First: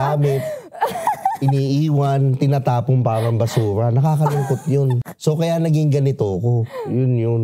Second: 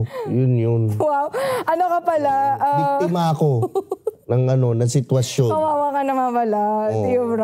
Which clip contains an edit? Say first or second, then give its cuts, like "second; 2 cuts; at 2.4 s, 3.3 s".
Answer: first; 1 cut; at 5.1 s